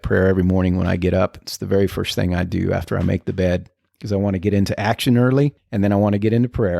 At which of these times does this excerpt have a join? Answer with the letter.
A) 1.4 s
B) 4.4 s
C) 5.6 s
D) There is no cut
C